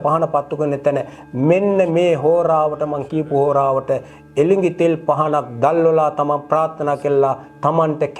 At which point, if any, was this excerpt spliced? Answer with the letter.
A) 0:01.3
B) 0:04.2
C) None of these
C